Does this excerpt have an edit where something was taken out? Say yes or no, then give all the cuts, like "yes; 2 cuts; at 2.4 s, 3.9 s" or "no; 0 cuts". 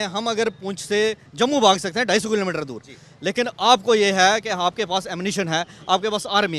no; 0 cuts